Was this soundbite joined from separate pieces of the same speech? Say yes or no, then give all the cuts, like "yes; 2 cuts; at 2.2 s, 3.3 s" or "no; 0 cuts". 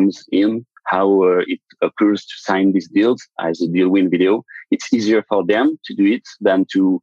no; 0 cuts